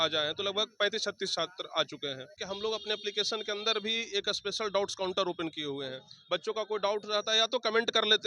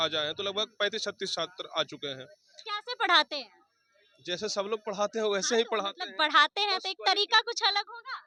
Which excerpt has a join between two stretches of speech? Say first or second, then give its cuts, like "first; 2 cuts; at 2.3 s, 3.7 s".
first; 1 cut; at 2.4 s